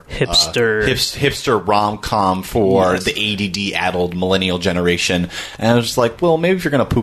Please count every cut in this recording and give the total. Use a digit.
0